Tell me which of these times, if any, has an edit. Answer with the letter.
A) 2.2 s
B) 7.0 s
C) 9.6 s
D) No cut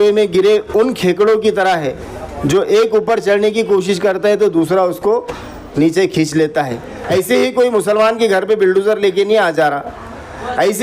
B